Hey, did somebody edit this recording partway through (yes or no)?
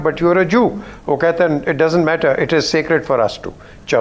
no